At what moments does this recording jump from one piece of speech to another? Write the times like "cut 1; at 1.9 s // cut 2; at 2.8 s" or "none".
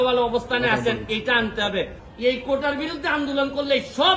cut 1; at 2.0 s